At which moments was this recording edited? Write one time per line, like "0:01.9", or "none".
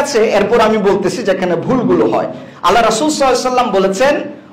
none